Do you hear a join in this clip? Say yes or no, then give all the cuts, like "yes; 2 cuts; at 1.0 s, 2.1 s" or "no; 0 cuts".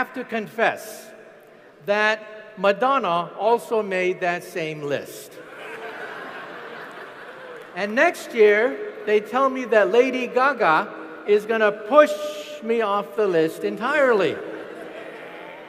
no; 0 cuts